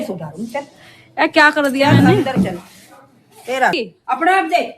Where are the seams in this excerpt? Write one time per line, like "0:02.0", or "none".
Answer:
0:03.8

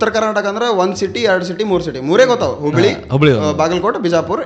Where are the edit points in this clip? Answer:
none

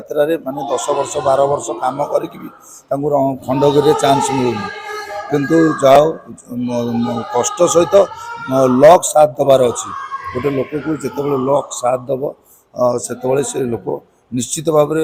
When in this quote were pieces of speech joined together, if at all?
none

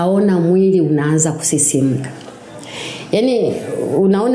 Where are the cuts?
none

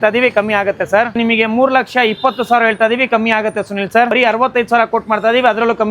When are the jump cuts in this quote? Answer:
0:01.2
0:04.1

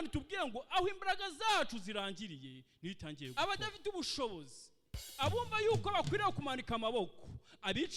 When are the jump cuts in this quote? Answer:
0:03.3

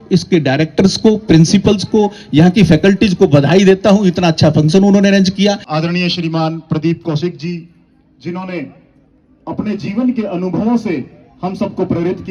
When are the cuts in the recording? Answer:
none

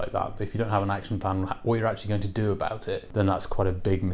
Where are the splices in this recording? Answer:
0:03.1

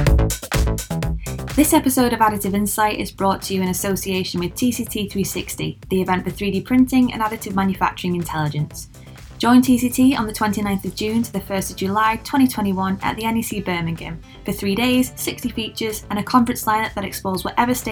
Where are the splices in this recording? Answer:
0:01.5

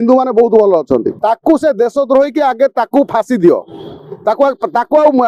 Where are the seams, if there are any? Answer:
0:01.1

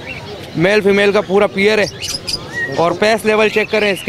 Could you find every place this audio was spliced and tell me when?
none

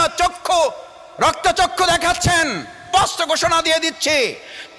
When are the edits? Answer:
0:02.8

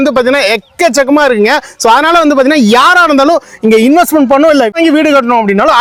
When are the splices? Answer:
none

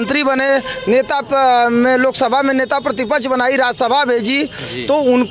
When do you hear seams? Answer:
none

